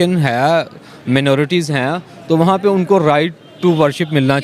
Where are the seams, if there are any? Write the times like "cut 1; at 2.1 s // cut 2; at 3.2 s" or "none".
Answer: none